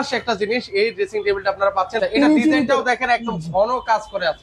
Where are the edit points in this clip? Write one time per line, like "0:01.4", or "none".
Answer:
0:01.9